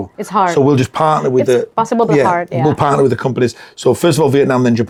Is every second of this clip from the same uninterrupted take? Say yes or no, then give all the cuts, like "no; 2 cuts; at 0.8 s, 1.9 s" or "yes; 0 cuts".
yes; 0 cuts